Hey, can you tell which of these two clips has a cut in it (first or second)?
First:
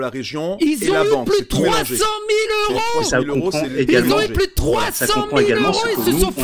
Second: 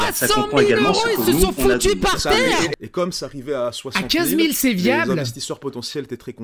second